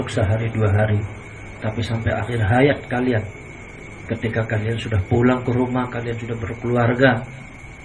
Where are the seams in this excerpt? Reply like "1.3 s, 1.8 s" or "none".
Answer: none